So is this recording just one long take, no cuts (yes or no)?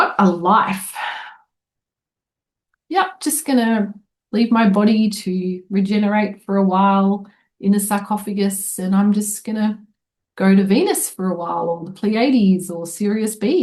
yes